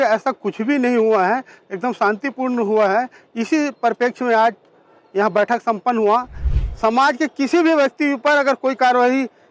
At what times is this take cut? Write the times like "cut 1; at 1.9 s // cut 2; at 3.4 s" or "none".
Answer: cut 1; at 6.4 s